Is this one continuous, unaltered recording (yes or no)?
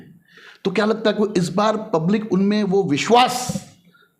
yes